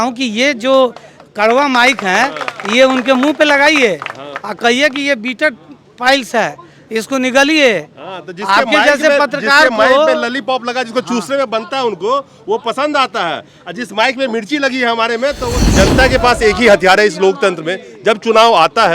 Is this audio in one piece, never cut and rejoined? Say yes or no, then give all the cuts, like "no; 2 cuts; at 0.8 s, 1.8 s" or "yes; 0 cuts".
no; 1 cut; at 15.7 s